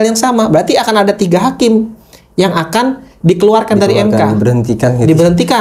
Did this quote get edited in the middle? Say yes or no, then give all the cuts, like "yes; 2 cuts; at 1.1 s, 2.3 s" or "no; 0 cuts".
no; 0 cuts